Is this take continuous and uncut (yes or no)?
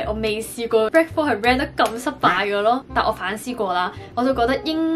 no